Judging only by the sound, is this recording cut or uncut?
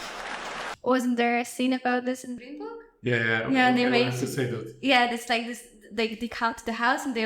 cut